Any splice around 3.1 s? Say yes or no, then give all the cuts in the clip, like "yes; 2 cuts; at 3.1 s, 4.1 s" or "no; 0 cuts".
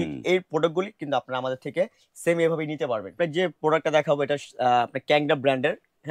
yes; 1 cut; at 3.1 s